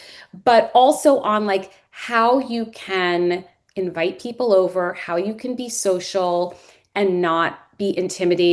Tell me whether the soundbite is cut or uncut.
uncut